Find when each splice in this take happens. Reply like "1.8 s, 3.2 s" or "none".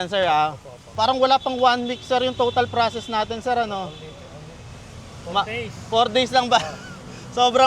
0.9 s